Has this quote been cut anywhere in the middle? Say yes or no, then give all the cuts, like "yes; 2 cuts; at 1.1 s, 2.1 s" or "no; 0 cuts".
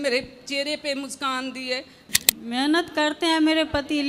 yes; 1 cut; at 2.1 s